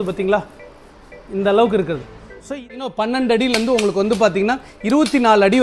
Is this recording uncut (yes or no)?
no